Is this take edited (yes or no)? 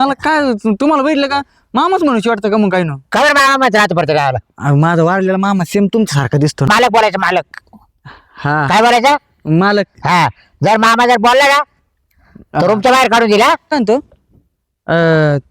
yes